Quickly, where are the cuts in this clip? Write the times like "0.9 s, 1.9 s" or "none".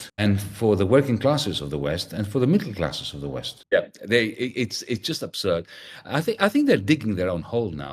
3.5 s